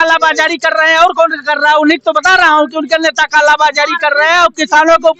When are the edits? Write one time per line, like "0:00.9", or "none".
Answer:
none